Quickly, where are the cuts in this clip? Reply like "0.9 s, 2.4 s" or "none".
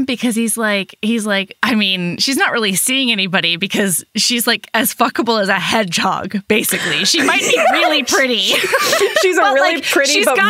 none